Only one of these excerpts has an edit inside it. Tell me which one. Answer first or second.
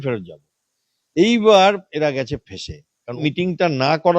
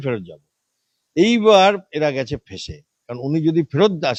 first